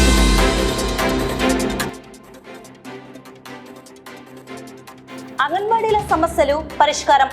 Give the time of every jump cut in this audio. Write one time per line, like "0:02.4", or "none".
0:01.9
0:05.0